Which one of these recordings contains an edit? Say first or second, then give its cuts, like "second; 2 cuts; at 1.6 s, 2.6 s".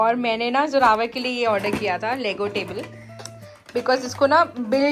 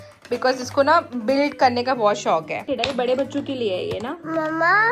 second; 1 cut; at 2.7 s